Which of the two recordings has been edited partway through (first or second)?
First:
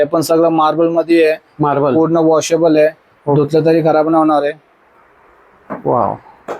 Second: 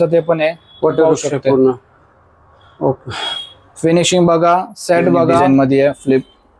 second